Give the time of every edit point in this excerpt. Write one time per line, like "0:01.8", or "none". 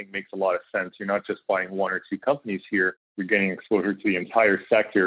0:03.1
0:04.3